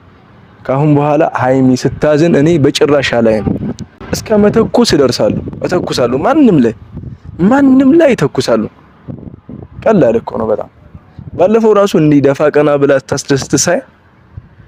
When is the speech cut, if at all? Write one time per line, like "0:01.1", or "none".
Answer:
none